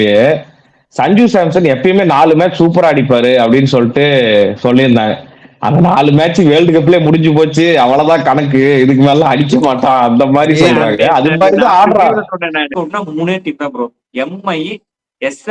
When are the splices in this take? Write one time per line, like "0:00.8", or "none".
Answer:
0:12.7